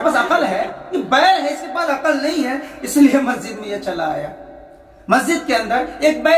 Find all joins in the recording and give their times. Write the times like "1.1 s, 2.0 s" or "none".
4.5 s